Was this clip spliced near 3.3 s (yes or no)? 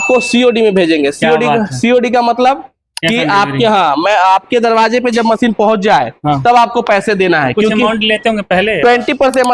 no